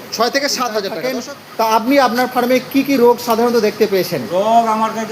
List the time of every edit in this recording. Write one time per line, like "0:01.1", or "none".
0:01.1